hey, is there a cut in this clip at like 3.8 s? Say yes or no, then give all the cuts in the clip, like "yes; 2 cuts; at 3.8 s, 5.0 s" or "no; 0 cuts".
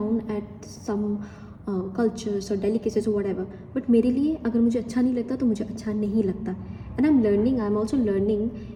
no; 0 cuts